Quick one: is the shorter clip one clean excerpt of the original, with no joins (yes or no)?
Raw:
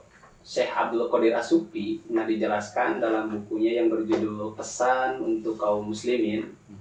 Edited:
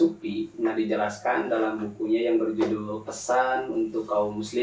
yes